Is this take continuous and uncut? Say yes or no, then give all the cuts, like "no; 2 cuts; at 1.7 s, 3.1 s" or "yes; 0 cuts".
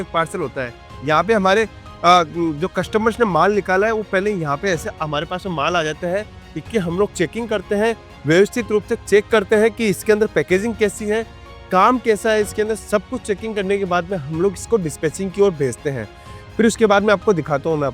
yes; 0 cuts